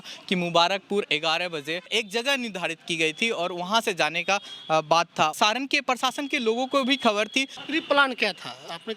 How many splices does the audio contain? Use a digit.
3